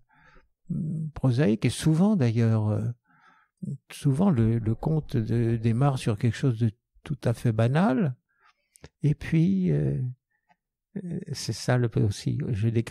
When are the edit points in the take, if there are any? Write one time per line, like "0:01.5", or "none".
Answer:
none